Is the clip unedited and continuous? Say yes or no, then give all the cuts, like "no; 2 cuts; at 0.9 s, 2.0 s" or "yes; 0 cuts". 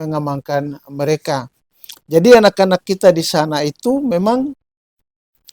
yes; 0 cuts